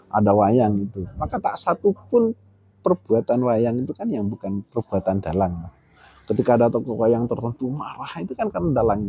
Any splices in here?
no; 0 cuts

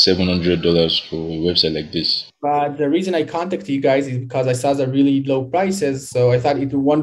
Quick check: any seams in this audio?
yes; 1 cut; at 2.2 s

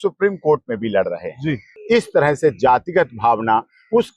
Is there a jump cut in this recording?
yes; 1 cut; at 1.7 s

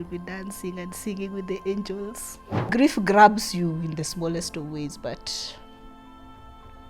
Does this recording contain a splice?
yes; 1 cut; at 2.6 s

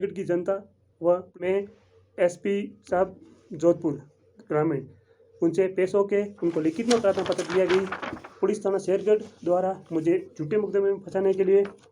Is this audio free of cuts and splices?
no; 1 cut; at 1.4 s

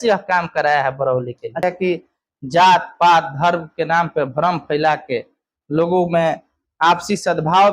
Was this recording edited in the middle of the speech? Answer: yes; 1 cut; at 1.6 s

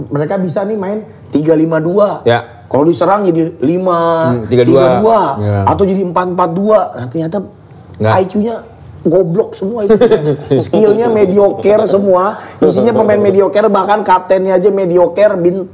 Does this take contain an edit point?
no; 0 cuts

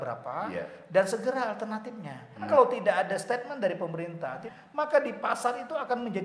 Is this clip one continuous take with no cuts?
no; 2 cuts; at 2.5 s, 4.4 s

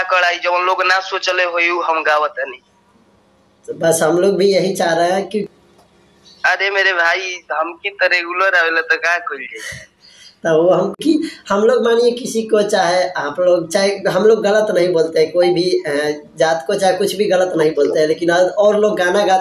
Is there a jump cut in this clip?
yes; 2 cuts; at 5.5 s, 10.9 s

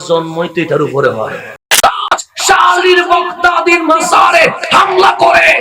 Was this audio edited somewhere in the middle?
yes; 1 cut; at 1.6 s

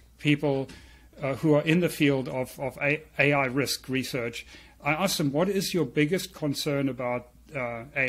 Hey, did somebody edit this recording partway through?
no; 0 cuts

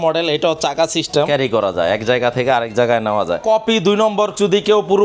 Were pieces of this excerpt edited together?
yes; 2 cuts; at 1.3 s, 3.4 s

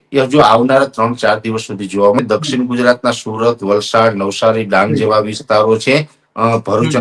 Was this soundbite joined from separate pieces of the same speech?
yes; 1 cut; at 2.2 s

